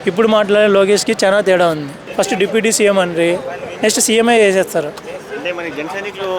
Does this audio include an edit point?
yes; 1 cut; at 2.0 s

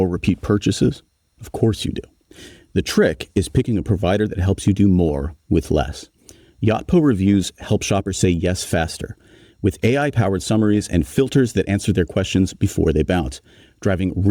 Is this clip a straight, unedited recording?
yes; 0 cuts

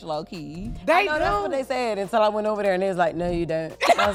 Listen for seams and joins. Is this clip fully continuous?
yes; 0 cuts

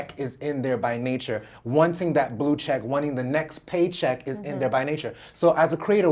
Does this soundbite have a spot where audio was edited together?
no; 0 cuts

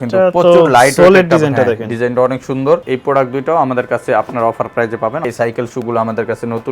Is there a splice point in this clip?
yes; 2 cuts; at 2.8 s, 5.2 s

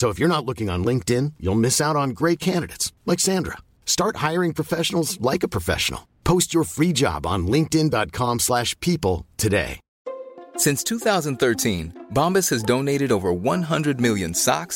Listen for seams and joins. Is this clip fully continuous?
yes; 0 cuts

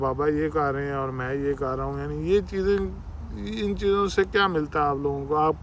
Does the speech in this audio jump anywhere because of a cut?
no; 0 cuts

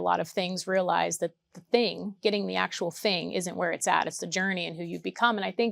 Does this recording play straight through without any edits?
yes; 0 cuts

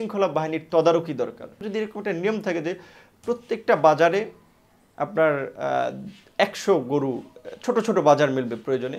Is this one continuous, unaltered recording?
no; 1 cut; at 1.6 s

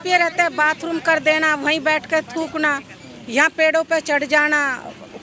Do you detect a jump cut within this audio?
no; 0 cuts

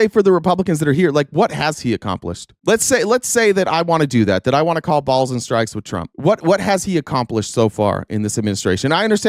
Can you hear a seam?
no; 0 cuts

